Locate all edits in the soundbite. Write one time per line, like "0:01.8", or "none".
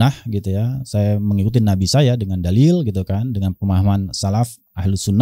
none